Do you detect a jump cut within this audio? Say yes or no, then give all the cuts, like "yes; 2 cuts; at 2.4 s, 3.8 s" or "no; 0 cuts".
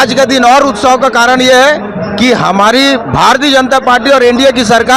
no; 0 cuts